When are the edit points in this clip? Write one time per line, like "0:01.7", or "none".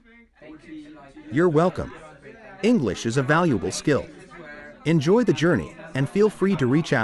none